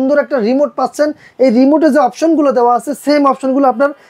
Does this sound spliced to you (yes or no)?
no